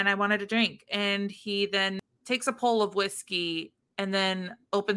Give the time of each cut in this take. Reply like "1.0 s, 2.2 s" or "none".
2.1 s